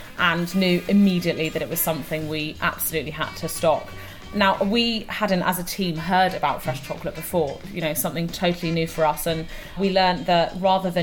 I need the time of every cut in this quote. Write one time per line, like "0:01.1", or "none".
0:09.8